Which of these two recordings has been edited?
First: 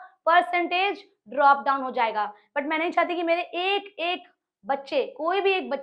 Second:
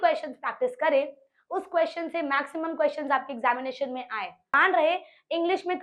second; 1 cut; at 4.5 s

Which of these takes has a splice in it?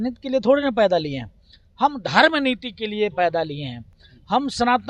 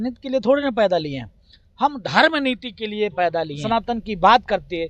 second; 1 cut; at 3.6 s

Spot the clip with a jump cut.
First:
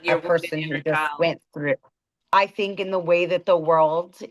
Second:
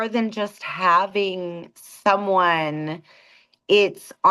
first; 1 cut; at 2.1 s

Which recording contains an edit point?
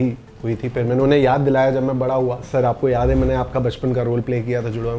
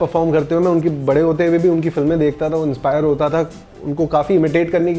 first; 1 cut; at 2.4 s

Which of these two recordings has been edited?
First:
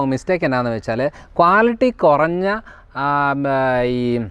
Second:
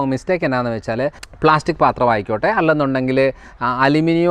second; 1 cut; at 1.2 s

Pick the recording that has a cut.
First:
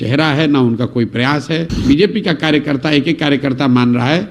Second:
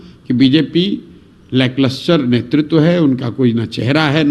first; 1 cut; at 1.7 s

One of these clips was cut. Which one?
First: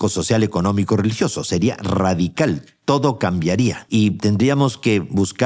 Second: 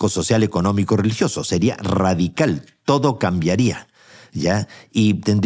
first; 1 cut; at 3.8 s

